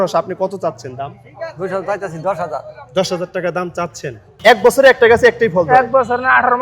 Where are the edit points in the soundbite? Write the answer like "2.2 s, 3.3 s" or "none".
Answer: 4.3 s